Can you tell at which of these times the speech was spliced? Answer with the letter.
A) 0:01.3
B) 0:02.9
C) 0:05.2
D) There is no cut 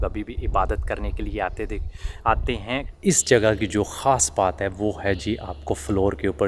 B